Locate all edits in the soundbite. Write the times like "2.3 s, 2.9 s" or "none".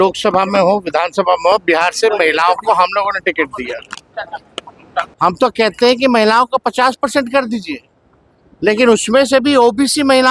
5.1 s